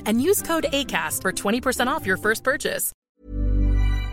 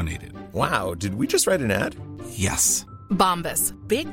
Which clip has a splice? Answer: first; 1 cut; at 3.0 s

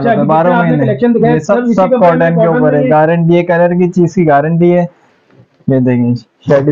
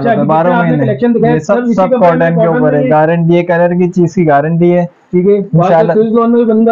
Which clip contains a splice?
first; 1 cut; at 5.0 s

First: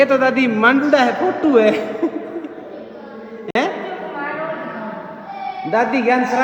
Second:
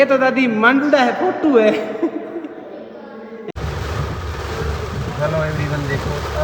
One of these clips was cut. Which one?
second; 1 cut; at 3.5 s

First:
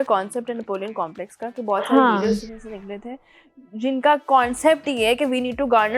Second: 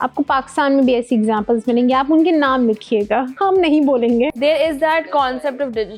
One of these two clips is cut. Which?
second; 2 cuts; at 3.3 s, 4.3 s

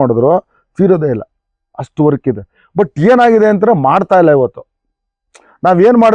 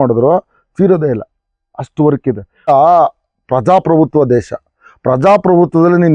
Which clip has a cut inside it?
second; 1 cut; at 2.7 s

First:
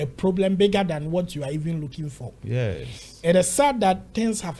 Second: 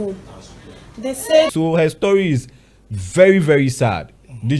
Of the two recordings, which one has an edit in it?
second; 1 cut; at 1.5 s

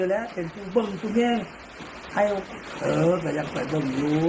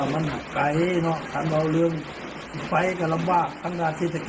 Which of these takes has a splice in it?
first; 1 cut; at 2.4 s

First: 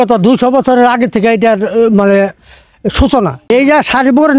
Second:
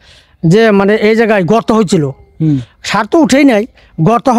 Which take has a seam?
first; 1 cut; at 3.4 s

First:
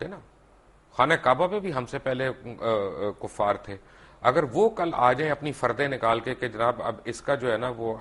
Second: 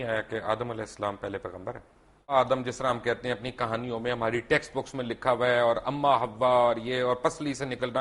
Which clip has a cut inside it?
second; 1 cut; at 2.3 s

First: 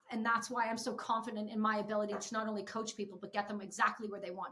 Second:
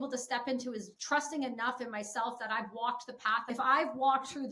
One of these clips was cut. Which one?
second; 2 cuts; at 0.9 s, 3.4 s

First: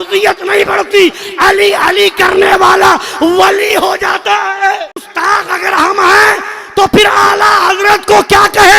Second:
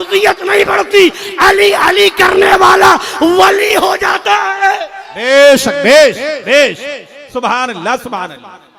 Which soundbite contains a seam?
first; 1 cut; at 5.0 s

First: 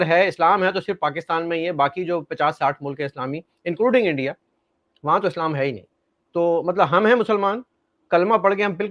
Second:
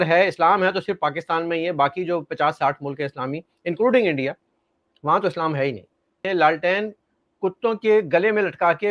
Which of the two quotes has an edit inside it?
second; 1 cut; at 6.2 s

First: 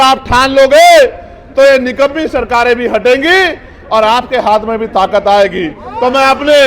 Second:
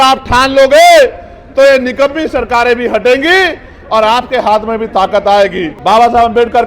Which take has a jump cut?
second; 1 cut; at 5.7 s

